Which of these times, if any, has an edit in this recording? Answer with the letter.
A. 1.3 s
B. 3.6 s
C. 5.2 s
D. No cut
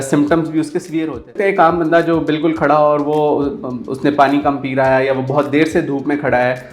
A